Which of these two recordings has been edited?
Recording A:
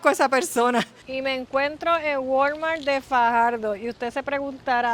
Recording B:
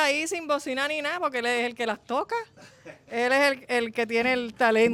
A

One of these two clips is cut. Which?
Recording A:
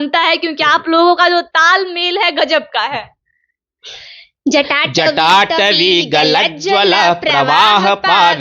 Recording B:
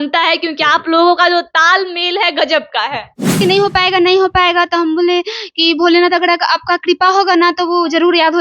B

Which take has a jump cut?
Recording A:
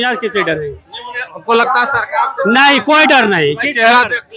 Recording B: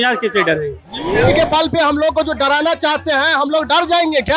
B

